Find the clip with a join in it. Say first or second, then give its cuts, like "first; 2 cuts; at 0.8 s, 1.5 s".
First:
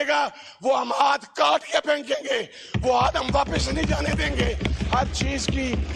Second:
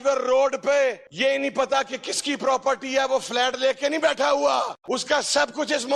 second; 2 cuts; at 1.1 s, 4.8 s